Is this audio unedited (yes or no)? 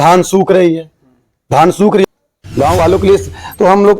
no